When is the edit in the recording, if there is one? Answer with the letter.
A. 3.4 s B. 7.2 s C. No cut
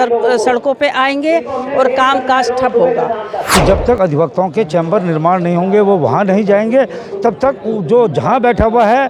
A